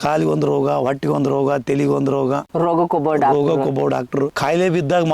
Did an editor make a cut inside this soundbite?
yes; 2 cuts; at 2.5 s, 4.3 s

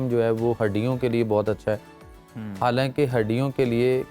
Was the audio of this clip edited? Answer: no; 0 cuts

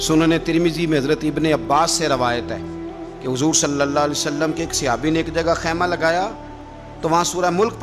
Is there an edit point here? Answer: no; 0 cuts

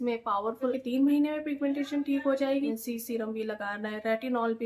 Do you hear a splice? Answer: yes; 2 cuts; at 0.8 s, 2.7 s

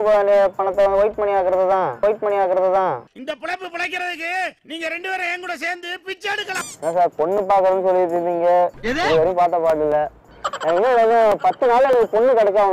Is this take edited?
yes; 3 cuts; at 1.9 s, 6.8 s, 10.1 s

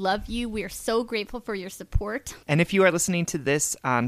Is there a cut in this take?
yes; 1 cut; at 2.4 s

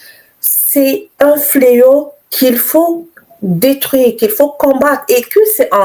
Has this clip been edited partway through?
no; 0 cuts

